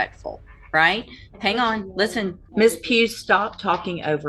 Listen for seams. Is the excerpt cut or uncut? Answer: cut